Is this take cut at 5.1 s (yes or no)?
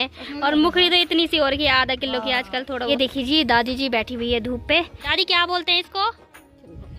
yes